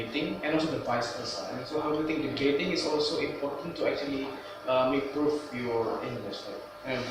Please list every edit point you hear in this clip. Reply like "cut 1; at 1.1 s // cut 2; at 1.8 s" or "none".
none